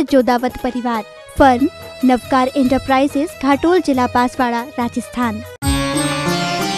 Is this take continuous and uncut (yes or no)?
no